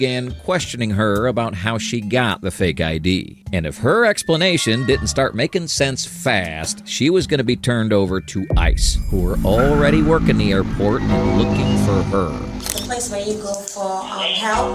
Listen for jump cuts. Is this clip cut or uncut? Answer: uncut